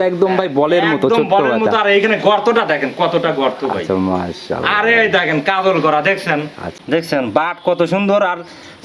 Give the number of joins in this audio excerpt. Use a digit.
1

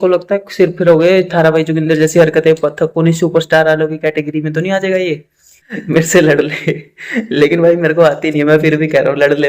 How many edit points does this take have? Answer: 1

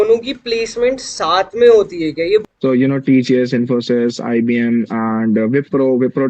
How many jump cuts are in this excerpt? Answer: 1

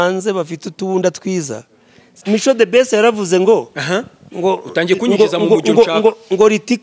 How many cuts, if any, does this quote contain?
1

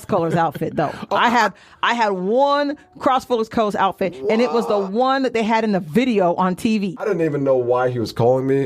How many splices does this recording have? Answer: 1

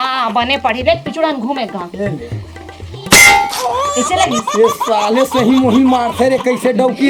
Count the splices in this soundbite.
0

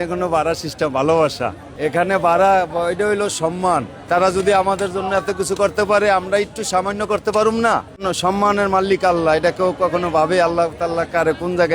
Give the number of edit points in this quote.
3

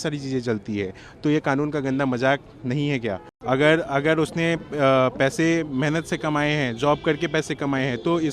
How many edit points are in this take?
1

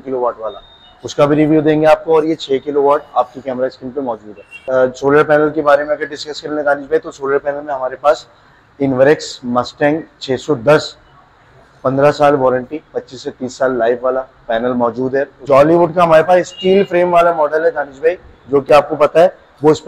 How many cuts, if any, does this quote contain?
2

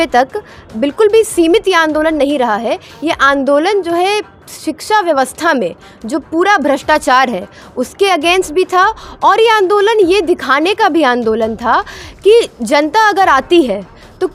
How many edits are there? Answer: 0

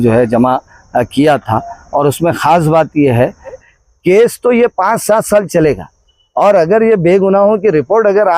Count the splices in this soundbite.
1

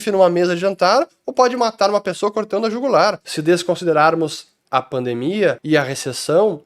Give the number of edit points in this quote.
2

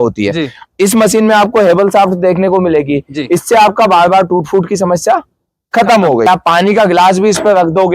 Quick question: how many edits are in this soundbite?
1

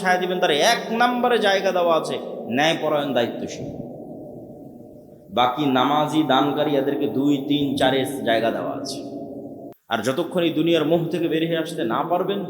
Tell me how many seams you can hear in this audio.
1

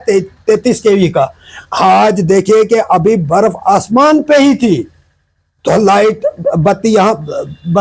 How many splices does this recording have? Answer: 0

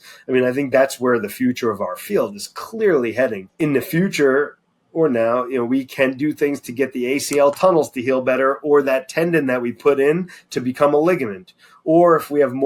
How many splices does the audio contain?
1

